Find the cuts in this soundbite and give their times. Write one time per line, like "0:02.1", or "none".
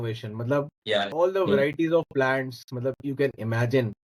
0:01.1